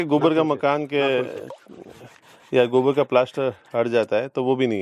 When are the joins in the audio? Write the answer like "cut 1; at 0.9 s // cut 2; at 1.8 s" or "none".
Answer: none